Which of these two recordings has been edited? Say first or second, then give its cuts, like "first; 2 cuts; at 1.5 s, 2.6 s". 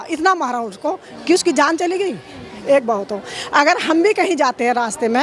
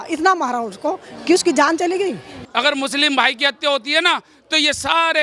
second; 1 cut; at 2.4 s